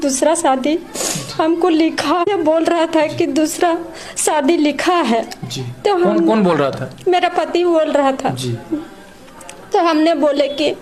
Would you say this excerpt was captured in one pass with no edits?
yes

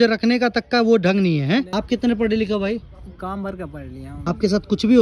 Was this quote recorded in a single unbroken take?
no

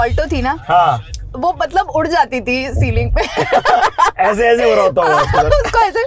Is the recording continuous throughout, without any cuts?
yes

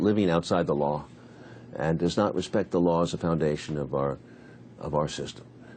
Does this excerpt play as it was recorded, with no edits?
no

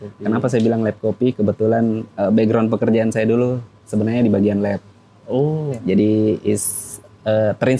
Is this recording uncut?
yes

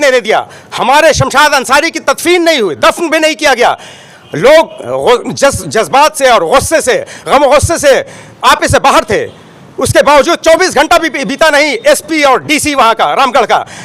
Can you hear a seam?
no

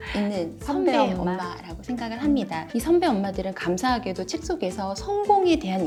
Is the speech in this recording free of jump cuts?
yes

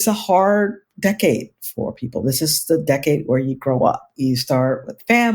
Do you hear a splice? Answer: yes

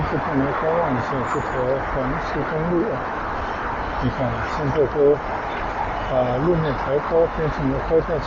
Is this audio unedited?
yes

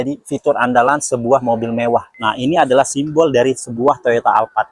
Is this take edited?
yes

